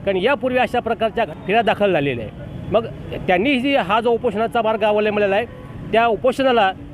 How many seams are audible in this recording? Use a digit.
1